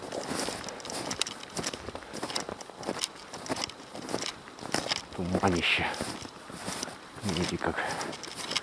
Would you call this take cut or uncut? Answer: uncut